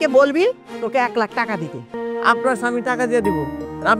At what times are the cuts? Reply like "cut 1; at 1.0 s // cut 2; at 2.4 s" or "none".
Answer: cut 1; at 2.0 s